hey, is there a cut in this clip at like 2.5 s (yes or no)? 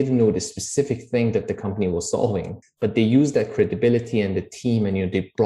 yes